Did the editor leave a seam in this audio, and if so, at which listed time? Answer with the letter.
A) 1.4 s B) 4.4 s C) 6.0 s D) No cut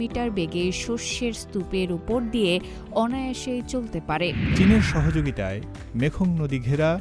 B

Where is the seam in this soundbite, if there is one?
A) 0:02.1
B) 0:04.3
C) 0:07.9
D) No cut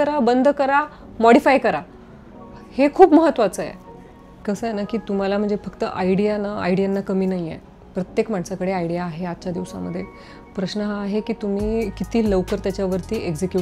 D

